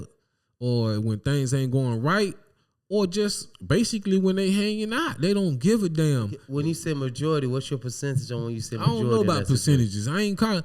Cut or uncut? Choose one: cut